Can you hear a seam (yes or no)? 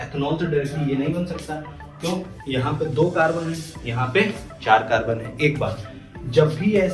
no